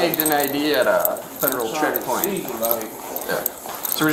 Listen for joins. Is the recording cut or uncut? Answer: uncut